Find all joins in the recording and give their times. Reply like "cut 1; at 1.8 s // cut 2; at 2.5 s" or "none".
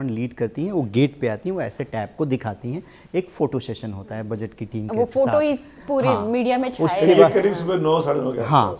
none